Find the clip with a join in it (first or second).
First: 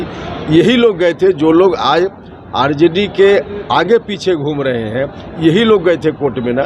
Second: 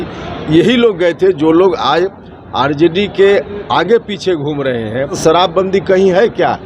second